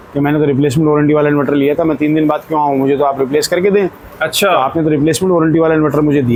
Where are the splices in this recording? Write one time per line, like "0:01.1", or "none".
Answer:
none